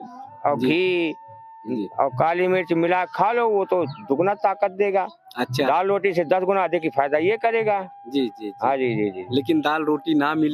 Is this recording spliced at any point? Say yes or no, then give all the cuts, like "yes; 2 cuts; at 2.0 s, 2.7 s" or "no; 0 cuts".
no; 0 cuts